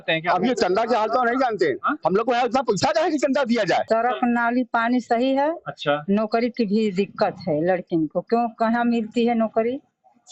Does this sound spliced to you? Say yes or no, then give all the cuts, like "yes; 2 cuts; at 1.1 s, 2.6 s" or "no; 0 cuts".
yes; 1 cut; at 3.8 s